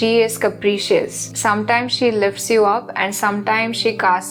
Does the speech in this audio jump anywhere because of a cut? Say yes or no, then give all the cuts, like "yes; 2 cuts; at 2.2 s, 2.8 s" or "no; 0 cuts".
no; 0 cuts